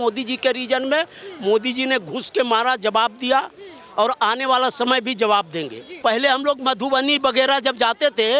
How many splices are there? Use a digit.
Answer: 1